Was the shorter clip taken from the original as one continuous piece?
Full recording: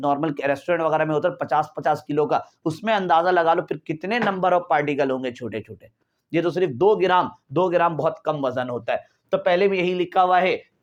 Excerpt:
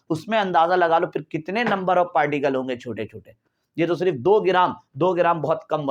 yes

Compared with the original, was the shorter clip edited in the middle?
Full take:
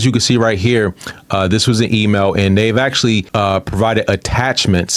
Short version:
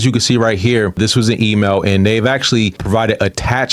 yes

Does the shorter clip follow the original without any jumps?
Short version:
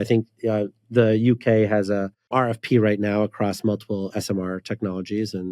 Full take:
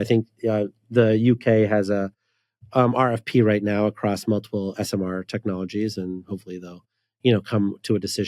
no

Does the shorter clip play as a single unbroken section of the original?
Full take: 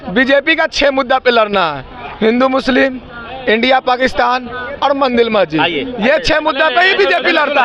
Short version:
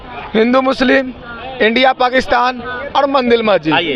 yes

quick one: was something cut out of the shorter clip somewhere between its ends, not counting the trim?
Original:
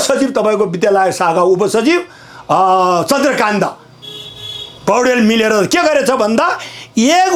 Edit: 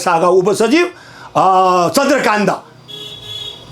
no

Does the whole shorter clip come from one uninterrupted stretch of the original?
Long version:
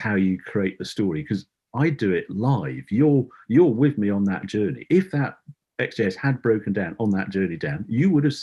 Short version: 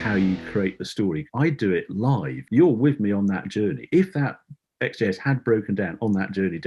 no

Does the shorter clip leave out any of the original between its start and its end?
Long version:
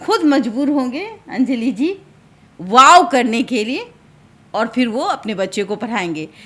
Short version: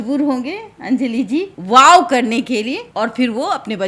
yes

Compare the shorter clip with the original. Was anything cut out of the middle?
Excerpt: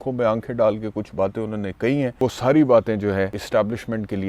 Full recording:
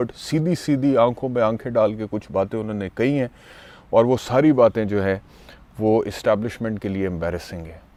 yes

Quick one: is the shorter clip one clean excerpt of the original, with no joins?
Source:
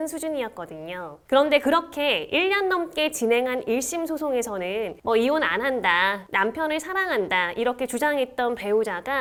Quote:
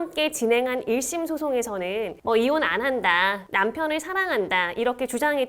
yes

